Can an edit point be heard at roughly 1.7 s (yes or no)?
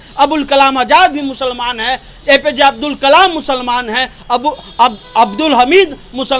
no